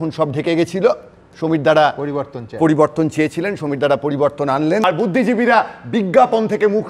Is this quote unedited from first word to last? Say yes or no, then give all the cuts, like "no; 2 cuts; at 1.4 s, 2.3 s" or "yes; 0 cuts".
no; 1 cut; at 4.8 s